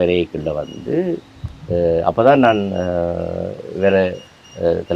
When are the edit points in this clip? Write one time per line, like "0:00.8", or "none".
none